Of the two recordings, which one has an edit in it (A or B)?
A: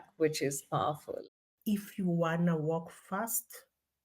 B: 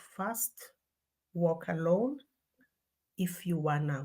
A